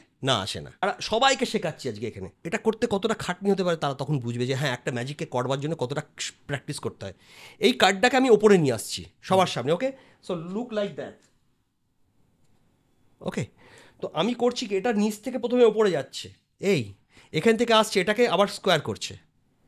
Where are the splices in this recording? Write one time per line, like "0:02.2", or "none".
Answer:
0:00.8
0:02.3